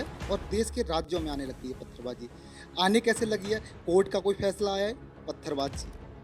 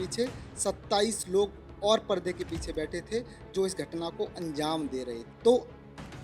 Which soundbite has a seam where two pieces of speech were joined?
second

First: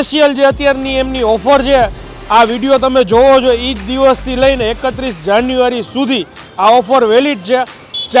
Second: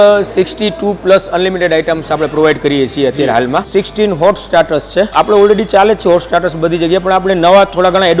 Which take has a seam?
second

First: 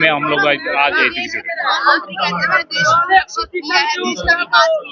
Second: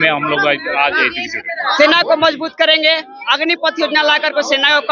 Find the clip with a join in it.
second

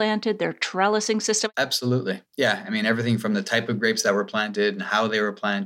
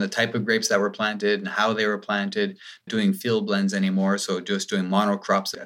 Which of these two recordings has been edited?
first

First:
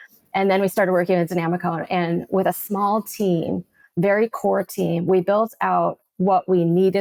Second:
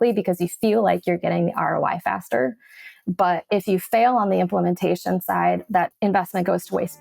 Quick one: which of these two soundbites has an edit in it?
second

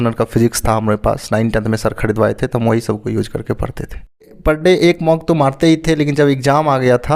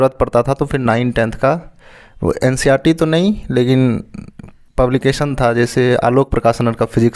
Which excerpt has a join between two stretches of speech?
first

